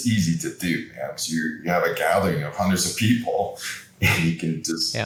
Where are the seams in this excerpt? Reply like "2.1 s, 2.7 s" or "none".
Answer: none